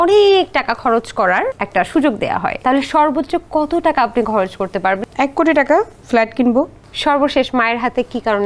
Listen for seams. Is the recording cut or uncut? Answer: cut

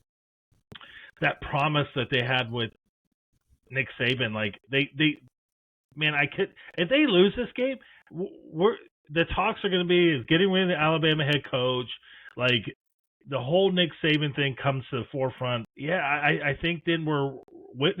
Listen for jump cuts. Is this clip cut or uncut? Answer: cut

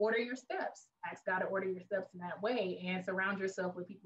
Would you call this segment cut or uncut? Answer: uncut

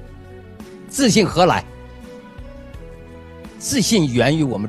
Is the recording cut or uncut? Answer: cut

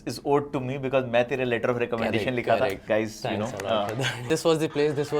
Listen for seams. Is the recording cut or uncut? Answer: cut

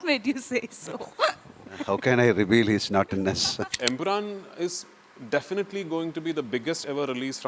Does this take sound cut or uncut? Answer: cut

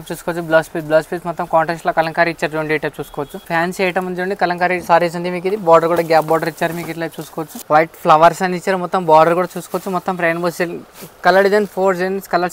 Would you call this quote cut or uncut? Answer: cut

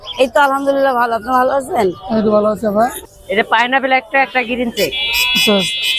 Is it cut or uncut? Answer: cut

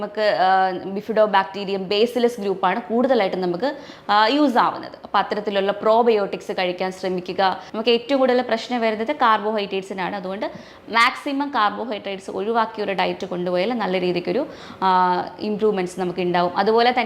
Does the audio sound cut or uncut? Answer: cut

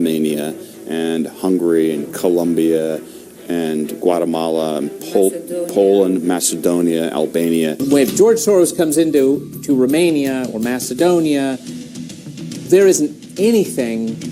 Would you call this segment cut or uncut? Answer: cut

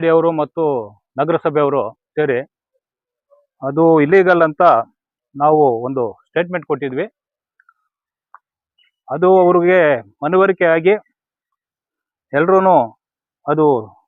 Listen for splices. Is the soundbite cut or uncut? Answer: uncut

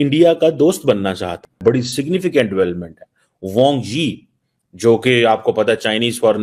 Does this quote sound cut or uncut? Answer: cut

